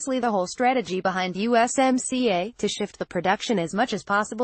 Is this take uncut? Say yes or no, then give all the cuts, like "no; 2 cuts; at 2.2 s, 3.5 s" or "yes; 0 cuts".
yes; 0 cuts